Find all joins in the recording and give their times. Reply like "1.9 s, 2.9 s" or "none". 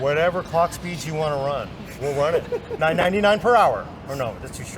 2.7 s